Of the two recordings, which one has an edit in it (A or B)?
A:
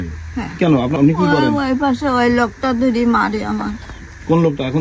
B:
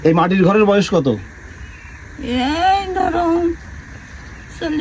A